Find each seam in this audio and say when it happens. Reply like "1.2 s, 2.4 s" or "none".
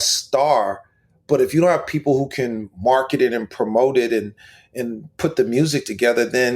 none